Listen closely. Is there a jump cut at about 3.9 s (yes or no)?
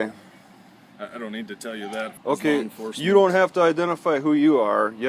no